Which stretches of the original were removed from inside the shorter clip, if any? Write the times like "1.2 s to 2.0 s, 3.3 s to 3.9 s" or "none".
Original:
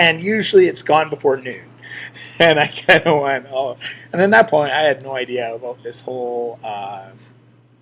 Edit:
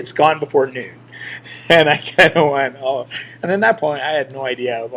none